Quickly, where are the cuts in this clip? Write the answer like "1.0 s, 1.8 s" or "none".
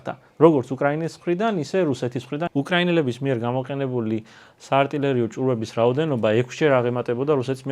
2.5 s